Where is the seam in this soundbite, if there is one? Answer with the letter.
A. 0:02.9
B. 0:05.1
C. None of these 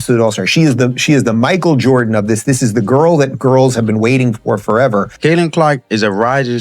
B